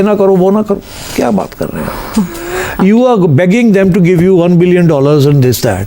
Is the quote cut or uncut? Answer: uncut